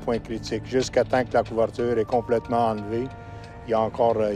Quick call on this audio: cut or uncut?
uncut